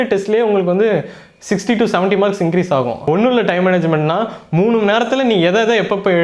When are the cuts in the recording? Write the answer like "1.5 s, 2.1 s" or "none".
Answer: 3.0 s